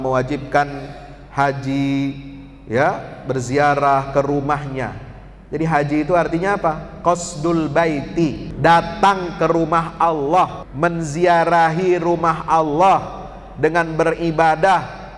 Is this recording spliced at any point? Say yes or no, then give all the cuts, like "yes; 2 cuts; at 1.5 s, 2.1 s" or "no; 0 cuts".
yes; 2 cuts; at 8.5 s, 10.6 s